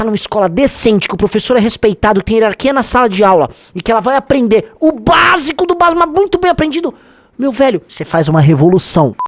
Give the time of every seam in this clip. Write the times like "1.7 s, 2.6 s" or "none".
7.9 s